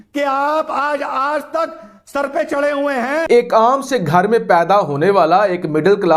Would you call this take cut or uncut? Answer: cut